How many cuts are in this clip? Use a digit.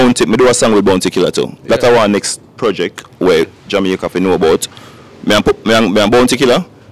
0